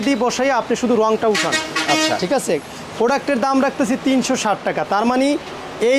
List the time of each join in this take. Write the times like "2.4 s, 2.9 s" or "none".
none